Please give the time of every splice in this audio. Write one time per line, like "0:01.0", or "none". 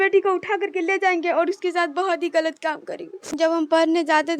0:03.3